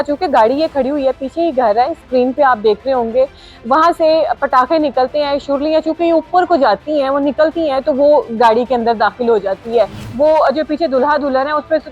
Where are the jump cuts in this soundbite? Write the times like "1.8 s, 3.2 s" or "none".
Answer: 10.0 s